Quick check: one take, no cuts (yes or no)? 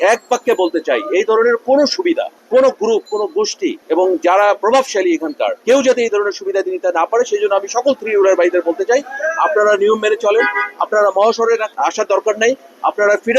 no